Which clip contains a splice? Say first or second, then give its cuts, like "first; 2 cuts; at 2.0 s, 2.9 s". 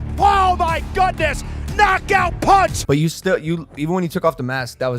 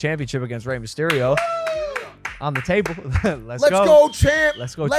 first; 1 cut; at 2.8 s